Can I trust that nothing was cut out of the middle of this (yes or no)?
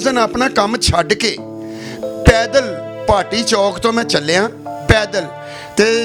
yes